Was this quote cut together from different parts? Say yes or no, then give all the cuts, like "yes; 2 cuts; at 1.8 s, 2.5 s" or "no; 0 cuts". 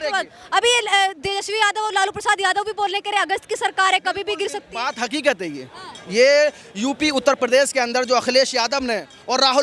no; 0 cuts